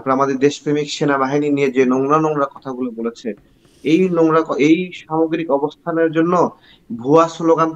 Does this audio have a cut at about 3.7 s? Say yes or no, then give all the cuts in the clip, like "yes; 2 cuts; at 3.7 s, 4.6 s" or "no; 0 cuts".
no; 0 cuts